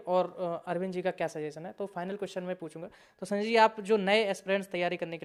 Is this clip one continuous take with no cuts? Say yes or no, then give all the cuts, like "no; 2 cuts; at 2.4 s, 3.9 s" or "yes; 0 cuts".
yes; 0 cuts